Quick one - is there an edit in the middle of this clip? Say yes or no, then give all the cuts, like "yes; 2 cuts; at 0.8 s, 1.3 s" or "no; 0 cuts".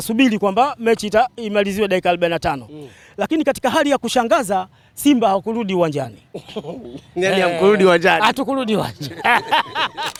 no; 0 cuts